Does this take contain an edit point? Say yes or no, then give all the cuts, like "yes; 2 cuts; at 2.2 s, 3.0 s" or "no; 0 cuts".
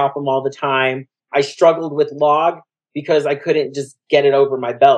yes; 1 cut; at 1.3 s